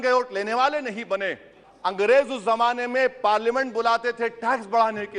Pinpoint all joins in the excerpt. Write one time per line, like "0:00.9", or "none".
0:01.6